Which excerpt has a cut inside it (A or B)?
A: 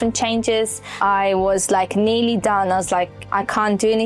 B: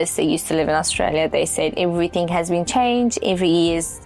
A